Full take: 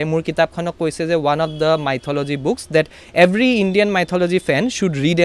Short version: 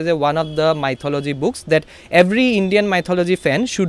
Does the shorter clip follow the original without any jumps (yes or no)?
yes